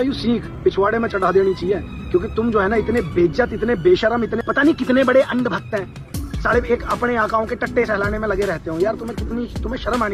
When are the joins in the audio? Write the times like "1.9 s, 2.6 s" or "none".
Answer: none